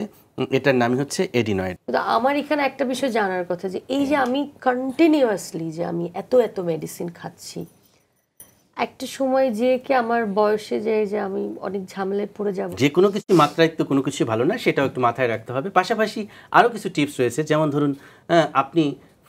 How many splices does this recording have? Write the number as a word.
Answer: two